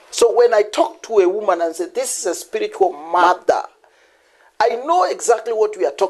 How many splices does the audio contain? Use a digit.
1